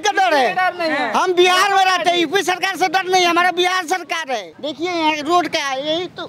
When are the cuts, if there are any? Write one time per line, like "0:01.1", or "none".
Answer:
0:04.5